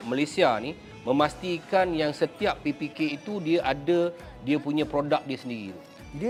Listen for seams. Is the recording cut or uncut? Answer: uncut